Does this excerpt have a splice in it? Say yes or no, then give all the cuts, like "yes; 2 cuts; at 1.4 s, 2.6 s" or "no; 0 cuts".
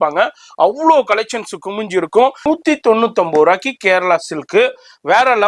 yes; 1 cut; at 2.4 s